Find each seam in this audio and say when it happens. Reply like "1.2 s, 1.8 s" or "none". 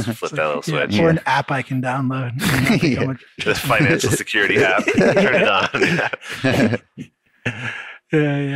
none